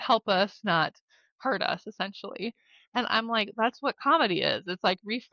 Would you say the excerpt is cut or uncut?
uncut